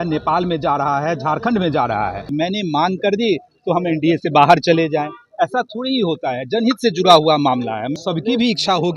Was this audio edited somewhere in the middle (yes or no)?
yes